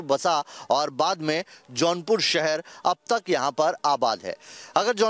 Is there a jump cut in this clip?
no; 0 cuts

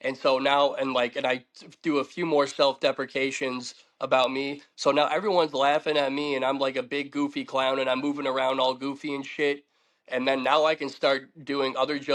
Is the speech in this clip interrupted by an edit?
no; 0 cuts

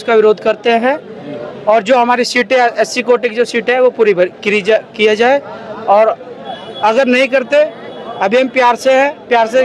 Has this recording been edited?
no; 0 cuts

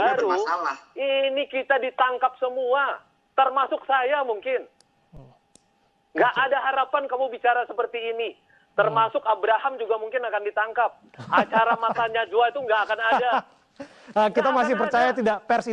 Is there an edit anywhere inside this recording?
no; 0 cuts

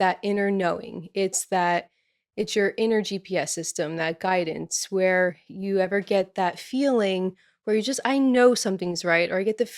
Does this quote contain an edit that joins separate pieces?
no; 0 cuts

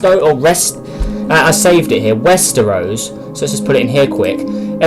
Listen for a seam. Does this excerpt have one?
yes; 1 cut; at 1.6 s

